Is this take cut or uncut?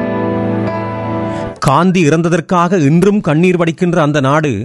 uncut